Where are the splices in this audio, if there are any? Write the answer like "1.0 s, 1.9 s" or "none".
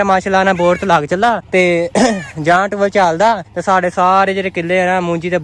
1.4 s, 3.5 s